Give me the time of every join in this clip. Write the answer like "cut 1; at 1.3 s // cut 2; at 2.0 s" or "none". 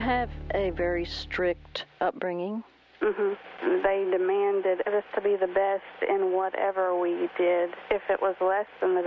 cut 1; at 3.5 s // cut 2; at 7.8 s